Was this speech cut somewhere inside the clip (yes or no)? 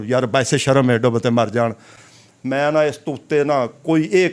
no